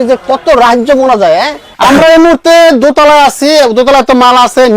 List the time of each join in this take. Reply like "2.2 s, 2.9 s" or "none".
1.6 s